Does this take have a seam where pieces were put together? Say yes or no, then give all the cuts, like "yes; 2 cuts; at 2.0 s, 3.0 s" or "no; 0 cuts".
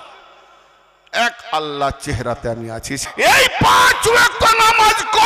yes; 1 cut; at 3.0 s